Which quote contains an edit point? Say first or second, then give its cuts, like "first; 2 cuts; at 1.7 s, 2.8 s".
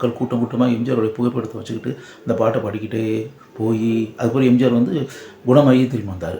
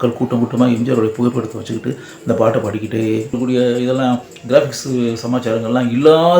second; 1 cut; at 3.4 s